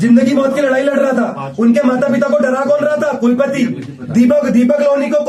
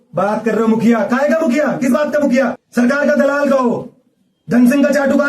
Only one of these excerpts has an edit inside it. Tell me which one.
second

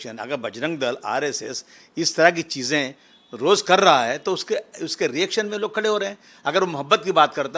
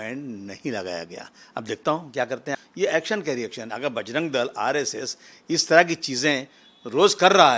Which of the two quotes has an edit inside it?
second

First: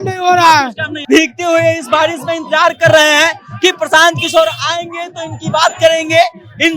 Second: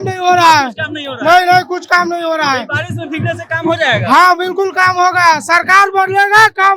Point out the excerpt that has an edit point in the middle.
first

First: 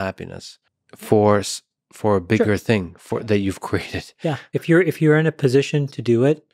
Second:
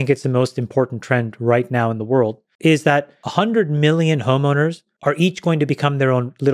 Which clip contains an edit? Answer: second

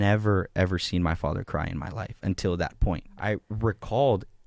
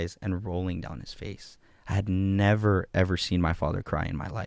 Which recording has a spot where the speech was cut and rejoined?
first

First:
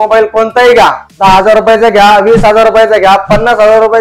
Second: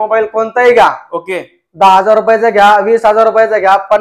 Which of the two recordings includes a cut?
first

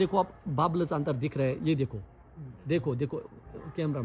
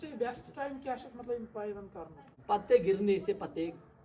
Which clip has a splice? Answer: second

